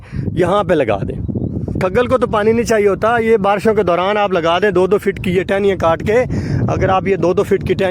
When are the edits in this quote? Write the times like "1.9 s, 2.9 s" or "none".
1.7 s